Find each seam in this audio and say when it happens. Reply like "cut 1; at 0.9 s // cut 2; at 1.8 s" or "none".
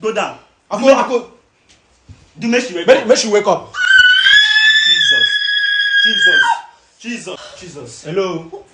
cut 1; at 7.3 s